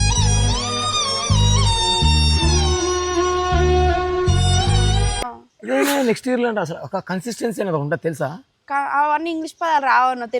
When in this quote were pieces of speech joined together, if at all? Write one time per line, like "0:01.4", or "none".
0:05.2